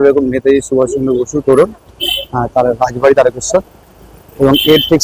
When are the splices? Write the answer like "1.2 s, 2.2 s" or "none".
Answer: none